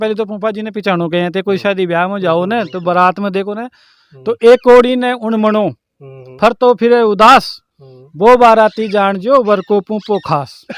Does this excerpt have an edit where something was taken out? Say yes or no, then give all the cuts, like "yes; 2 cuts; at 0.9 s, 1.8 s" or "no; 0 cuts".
no; 0 cuts